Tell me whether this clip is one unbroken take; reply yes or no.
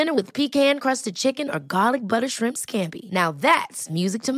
yes